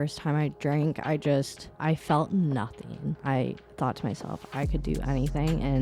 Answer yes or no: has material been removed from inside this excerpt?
yes